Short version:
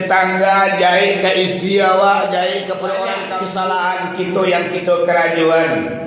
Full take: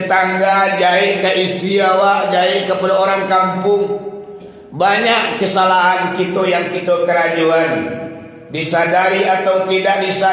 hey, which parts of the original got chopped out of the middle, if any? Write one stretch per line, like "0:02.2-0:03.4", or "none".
0:03.3-0:05.3